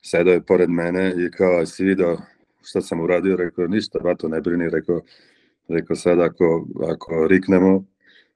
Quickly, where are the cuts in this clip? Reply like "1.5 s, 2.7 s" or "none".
none